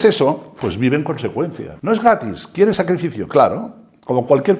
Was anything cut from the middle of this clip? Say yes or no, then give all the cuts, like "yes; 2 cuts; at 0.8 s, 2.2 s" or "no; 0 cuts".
yes; 1 cut; at 1.7 s